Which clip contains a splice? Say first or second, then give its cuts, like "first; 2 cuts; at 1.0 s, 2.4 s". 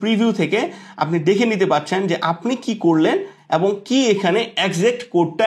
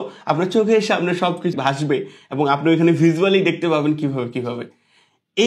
second; 1 cut; at 1.5 s